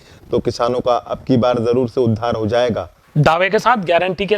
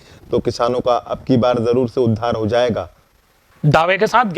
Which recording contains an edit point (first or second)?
first